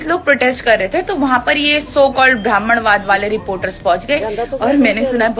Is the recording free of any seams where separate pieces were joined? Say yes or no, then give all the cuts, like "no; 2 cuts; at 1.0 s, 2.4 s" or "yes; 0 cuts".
yes; 0 cuts